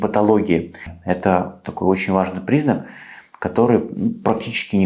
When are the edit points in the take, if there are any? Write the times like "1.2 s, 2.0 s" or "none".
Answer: 0.9 s

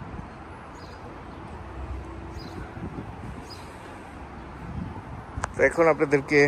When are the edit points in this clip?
none

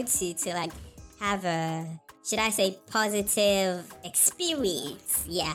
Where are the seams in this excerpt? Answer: none

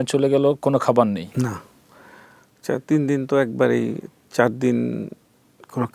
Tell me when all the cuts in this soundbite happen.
none

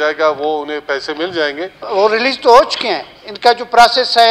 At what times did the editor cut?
1.8 s

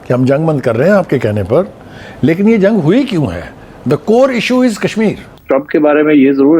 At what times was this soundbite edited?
5.3 s

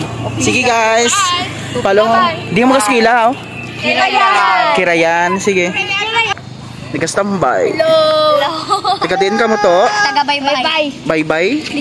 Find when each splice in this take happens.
6.3 s

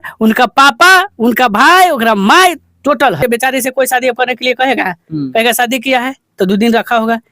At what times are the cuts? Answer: 3.2 s

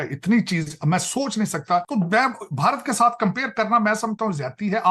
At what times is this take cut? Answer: 1.9 s

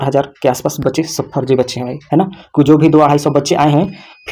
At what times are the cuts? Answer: none

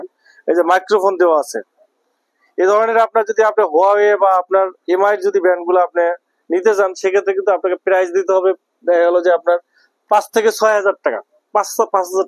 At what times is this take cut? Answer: 2.3 s

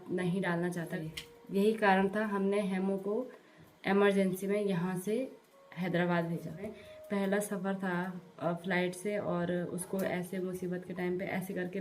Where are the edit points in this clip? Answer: 0.9 s, 6.7 s

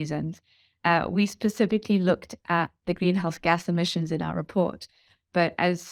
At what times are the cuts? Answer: none

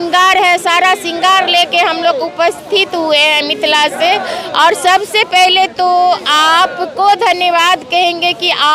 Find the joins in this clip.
none

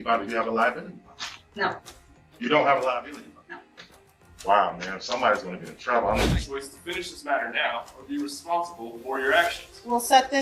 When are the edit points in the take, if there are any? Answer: 6.2 s

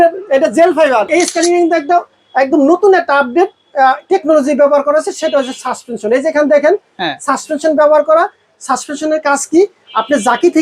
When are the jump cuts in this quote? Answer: 1.1 s

